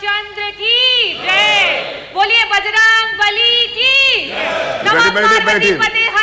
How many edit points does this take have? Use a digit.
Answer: 0